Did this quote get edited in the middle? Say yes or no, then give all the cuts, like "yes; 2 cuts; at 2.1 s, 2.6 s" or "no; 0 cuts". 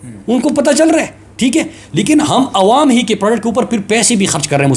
no; 0 cuts